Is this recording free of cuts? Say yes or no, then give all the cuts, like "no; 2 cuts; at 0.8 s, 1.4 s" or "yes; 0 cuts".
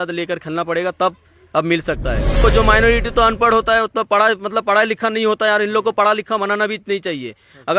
no; 1 cut; at 2.4 s